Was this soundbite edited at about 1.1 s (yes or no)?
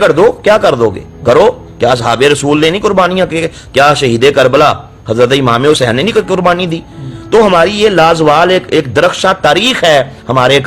no